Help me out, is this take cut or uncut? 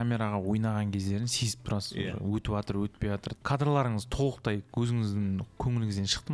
cut